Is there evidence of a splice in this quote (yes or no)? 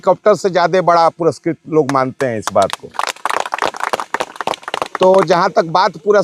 no